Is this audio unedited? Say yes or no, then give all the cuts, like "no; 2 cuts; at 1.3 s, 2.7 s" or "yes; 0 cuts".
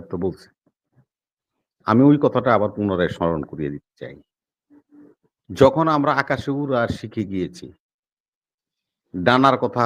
yes; 0 cuts